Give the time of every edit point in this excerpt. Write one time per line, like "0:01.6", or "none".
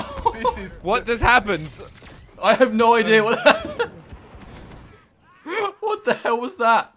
none